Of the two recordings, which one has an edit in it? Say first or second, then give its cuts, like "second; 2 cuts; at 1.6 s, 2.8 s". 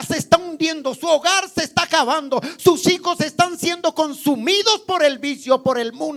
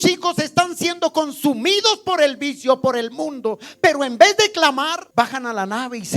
second; 1 cut; at 5.0 s